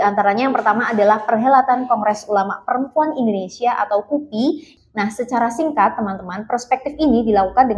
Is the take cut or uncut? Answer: cut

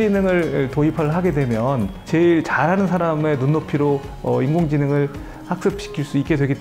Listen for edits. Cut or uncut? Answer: uncut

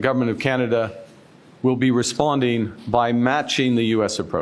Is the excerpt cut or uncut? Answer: uncut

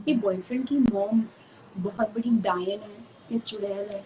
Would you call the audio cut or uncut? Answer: uncut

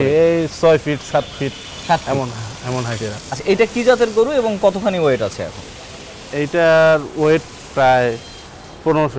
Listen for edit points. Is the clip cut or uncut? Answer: cut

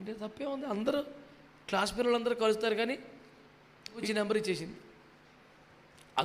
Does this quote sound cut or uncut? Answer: cut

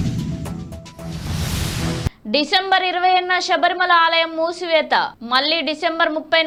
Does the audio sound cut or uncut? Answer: uncut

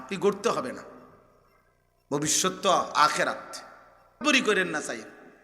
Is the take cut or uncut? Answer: cut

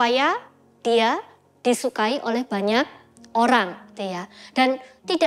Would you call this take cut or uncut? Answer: uncut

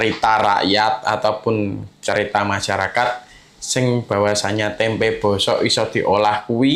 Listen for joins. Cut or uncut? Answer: uncut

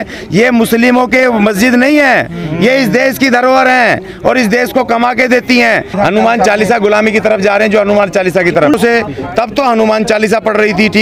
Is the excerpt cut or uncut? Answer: cut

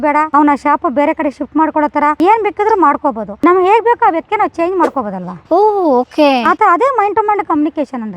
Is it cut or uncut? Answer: cut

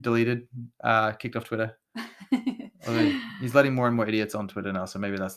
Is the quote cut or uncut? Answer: uncut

